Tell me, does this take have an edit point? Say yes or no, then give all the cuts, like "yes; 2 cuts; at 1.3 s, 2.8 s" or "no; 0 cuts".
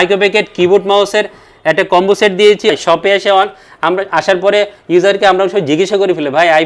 yes; 1 cut; at 2.7 s